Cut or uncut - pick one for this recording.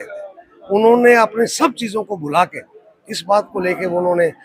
uncut